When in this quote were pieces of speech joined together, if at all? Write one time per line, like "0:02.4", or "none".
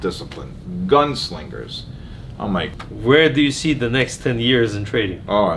0:02.7